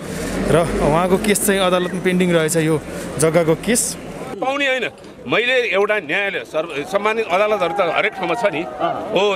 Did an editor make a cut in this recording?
yes; 1 cut; at 4.3 s

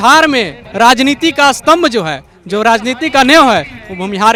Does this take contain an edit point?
no; 0 cuts

